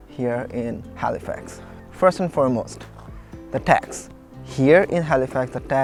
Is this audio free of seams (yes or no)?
yes